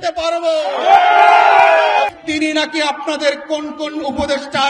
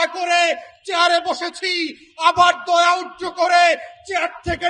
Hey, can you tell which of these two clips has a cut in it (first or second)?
first